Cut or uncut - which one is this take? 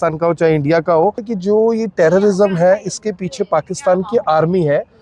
cut